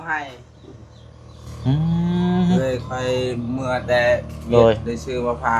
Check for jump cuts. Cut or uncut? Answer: uncut